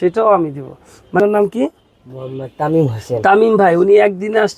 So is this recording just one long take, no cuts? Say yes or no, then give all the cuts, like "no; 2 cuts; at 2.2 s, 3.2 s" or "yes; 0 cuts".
no; 1 cut; at 1.2 s